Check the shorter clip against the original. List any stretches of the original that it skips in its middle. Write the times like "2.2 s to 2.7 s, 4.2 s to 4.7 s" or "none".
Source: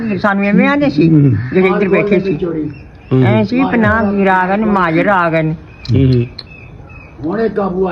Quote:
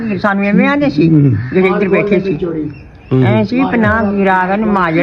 none